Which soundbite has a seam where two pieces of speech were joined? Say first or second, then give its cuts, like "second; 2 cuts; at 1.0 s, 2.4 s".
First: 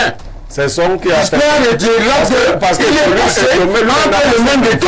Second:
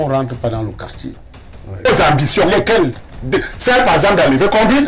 second; 1 cut; at 1.9 s